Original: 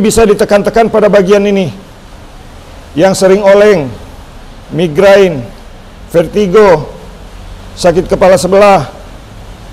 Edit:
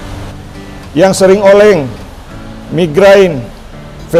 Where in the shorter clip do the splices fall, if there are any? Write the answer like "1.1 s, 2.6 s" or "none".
none